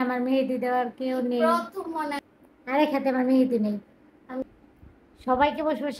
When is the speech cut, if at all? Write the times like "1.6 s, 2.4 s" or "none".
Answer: 2.2 s, 4.5 s